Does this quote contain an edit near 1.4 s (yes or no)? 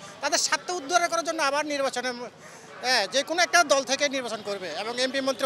no